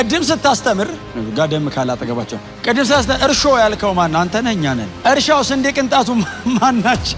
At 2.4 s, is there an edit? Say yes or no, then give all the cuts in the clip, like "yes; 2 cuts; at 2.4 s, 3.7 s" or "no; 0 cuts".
yes; 3 cuts; at 1.1 s, 2.4 s, 4.9 s